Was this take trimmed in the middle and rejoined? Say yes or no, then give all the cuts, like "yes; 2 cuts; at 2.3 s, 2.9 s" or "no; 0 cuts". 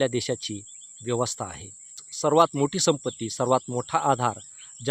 yes; 1 cut; at 2.1 s